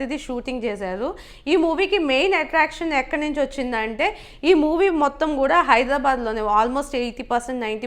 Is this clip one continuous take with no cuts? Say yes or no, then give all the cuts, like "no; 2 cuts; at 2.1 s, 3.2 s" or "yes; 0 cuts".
yes; 0 cuts